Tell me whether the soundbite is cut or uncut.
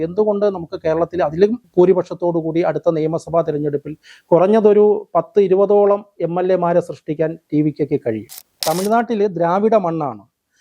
cut